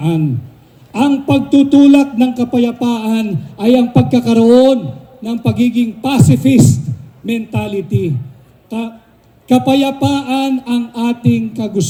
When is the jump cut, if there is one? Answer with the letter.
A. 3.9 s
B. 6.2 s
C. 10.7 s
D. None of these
D